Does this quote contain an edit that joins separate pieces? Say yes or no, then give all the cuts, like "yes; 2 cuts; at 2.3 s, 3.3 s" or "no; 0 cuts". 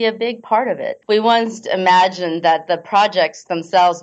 yes; 1 cut; at 0.9 s